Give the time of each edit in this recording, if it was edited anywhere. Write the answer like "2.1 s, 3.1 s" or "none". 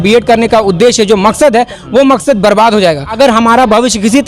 3.1 s